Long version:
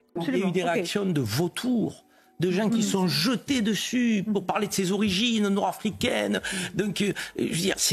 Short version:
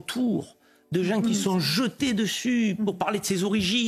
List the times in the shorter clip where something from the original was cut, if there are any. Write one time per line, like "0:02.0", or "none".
none

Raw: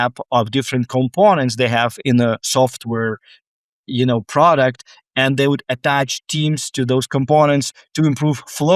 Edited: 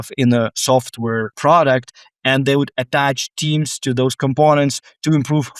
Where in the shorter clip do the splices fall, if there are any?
0:01.3

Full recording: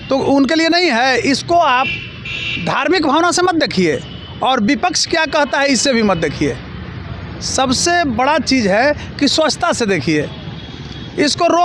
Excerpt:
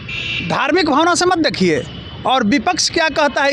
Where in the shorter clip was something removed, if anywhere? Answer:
none

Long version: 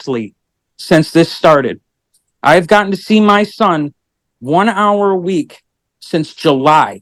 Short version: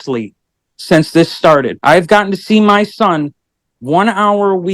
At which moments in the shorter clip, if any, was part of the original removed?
0:01.7

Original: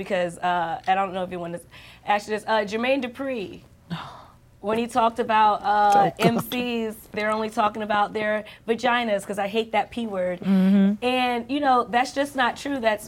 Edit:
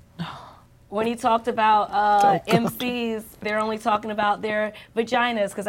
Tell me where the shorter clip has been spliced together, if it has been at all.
none

